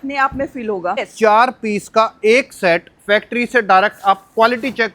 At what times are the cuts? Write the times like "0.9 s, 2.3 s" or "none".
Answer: 1.1 s